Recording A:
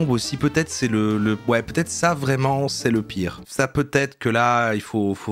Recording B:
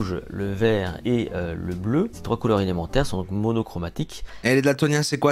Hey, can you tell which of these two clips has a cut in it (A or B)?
B